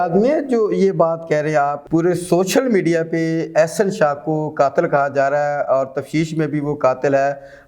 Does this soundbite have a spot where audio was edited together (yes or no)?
yes